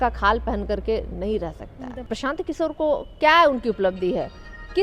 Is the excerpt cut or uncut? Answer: cut